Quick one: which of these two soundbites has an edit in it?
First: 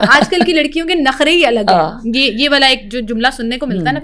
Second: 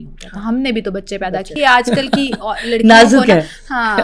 second; 1 cut; at 1.5 s

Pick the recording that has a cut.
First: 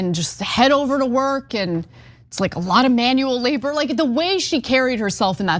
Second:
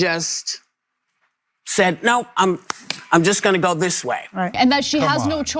second; 1 cut; at 4.5 s

